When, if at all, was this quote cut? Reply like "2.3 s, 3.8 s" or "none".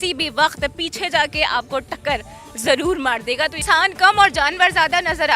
3.6 s